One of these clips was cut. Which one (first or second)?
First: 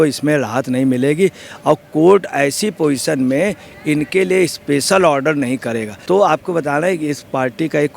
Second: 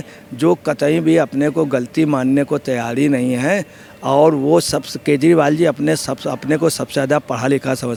first